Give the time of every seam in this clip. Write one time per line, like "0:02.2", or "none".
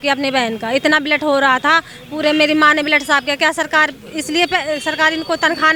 none